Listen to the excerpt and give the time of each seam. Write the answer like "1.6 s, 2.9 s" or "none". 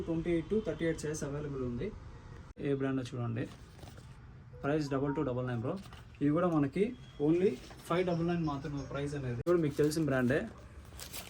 2.6 s, 9.5 s